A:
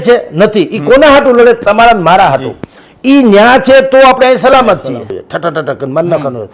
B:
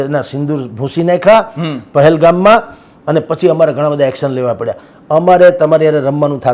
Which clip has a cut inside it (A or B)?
A